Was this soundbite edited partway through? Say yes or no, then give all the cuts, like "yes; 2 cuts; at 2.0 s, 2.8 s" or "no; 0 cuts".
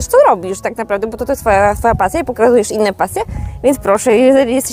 no; 0 cuts